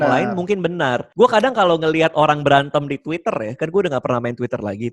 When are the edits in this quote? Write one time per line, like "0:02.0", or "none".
0:01.0